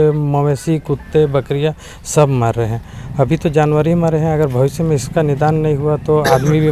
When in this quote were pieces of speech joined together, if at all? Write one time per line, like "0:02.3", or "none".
none